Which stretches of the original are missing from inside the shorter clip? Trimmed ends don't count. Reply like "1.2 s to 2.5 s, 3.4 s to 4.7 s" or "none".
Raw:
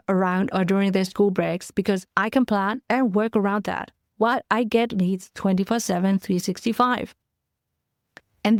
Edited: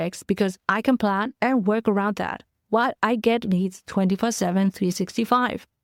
none